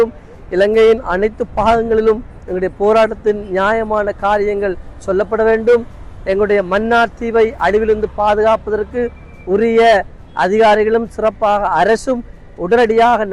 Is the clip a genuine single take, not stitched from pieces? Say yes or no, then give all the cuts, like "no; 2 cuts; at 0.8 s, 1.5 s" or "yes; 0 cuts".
yes; 0 cuts